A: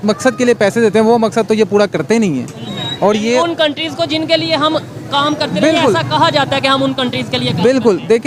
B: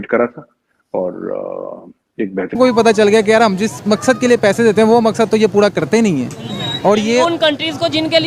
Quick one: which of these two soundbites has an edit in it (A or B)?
B